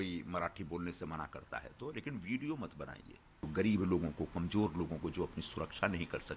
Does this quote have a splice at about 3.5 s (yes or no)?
yes